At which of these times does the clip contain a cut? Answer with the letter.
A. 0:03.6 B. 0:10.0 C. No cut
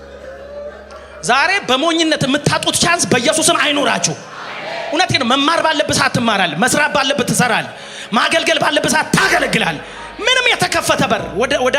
C